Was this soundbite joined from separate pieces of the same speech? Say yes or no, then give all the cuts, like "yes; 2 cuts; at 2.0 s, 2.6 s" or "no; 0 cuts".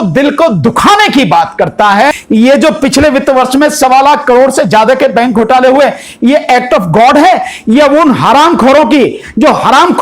yes; 1 cut; at 2.2 s